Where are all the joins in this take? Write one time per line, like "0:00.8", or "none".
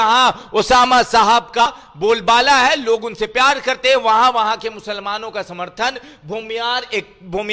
0:01.6